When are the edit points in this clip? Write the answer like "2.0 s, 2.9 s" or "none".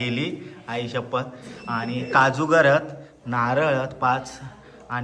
none

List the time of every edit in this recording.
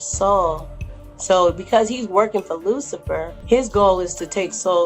3.3 s

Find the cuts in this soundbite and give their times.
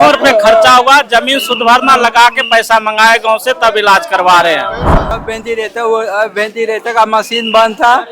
5.2 s

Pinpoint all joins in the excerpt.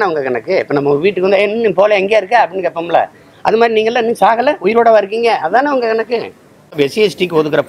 6.7 s

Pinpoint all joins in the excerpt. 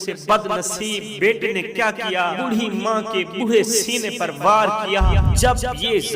1.1 s, 2.4 s, 5.3 s

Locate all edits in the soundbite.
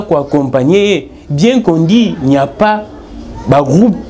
none

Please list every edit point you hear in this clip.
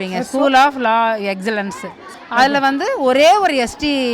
none

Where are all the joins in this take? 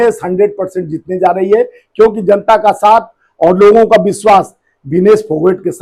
none

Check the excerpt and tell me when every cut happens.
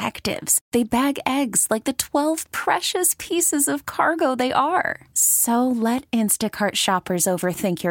none

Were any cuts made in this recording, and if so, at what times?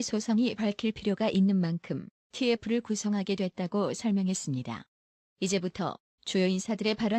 4.2 s

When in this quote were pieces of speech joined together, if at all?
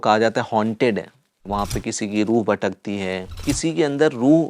1.4 s, 3.4 s

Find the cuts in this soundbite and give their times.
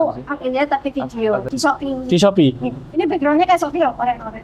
1.5 s

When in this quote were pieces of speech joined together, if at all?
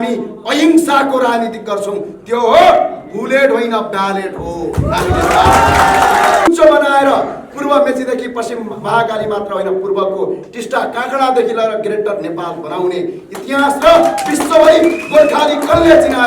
6.5 s

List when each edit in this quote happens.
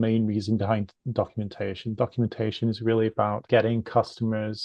none

